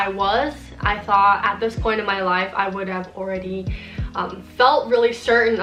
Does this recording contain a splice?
no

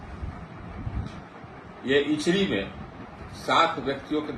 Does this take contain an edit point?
no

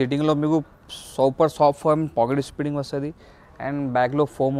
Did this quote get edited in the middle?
no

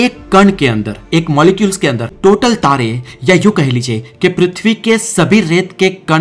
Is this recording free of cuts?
no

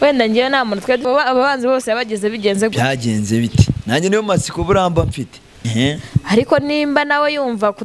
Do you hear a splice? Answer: yes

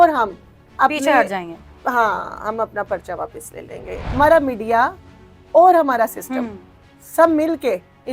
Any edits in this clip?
yes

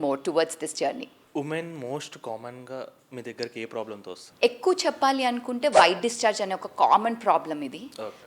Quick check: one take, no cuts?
no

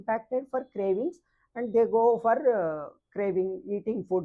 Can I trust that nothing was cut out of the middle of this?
yes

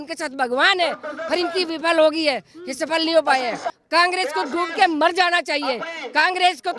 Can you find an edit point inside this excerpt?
yes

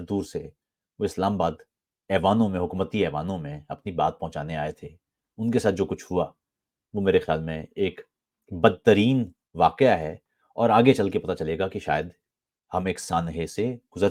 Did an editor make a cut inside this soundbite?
no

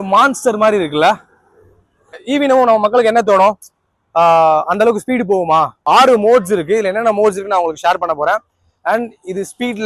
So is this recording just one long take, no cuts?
no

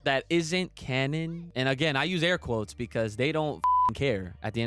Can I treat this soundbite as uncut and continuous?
no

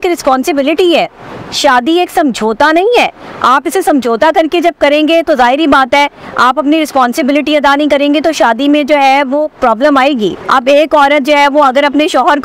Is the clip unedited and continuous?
no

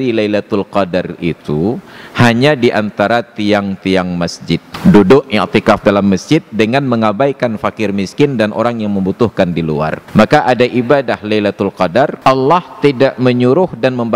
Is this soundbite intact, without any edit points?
no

